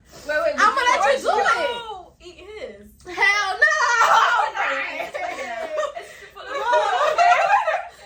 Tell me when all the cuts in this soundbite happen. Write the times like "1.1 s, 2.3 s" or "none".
none